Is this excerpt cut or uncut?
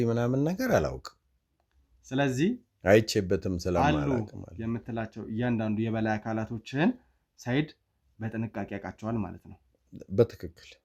uncut